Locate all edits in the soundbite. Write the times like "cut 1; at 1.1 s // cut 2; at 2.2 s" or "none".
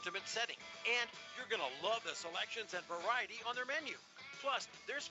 none